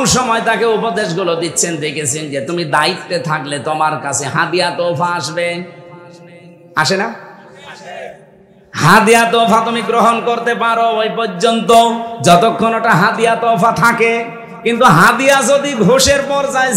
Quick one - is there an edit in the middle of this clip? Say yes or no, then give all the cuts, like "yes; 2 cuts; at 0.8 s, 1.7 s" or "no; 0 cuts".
no; 0 cuts